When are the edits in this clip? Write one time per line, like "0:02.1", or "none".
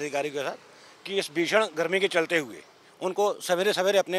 none